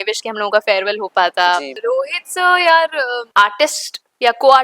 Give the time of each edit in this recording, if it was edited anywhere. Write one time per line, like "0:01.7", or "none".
0:01.7
0:03.2